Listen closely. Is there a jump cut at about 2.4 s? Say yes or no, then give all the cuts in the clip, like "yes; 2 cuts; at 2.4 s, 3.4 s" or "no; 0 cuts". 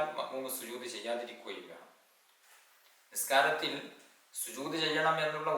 yes; 1 cut; at 2.4 s